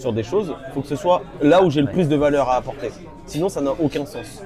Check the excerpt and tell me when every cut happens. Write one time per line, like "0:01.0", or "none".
none